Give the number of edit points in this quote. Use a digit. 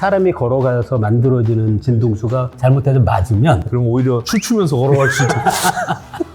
1